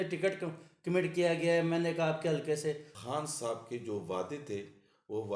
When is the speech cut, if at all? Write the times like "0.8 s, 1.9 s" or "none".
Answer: 2.9 s